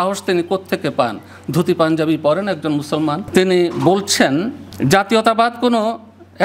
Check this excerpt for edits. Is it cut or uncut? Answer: cut